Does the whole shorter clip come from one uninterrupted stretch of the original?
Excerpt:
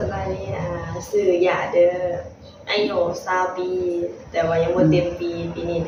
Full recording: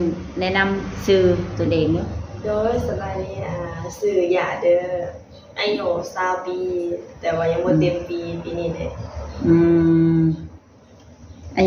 yes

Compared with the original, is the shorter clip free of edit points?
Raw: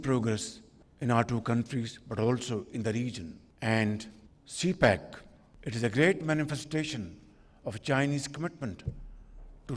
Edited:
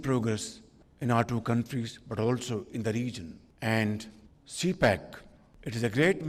yes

